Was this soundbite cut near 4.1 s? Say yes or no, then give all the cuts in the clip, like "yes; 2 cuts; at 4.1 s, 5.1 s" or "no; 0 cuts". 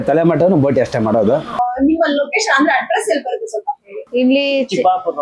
no; 1 cut; at 1.7 s